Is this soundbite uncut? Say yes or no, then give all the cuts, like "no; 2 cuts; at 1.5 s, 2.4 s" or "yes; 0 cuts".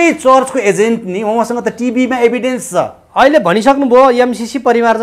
yes; 0 cuts